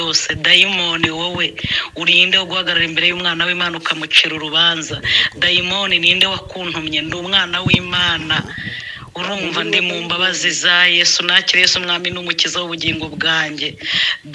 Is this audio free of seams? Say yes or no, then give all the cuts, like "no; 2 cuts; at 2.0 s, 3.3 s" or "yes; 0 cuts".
yes; 0 cuts